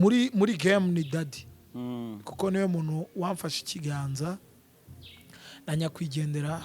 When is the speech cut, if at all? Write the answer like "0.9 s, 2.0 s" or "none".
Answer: none